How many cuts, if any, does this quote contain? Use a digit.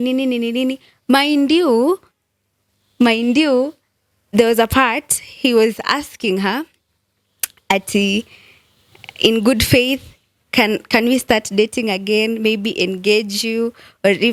0